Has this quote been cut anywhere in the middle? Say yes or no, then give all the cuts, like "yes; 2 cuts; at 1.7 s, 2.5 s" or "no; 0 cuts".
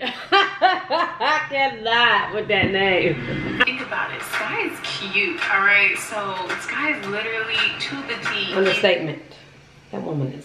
yes; 1 cut; at 3.6 s